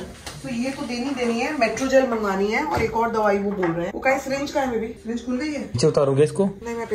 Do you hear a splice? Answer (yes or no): yes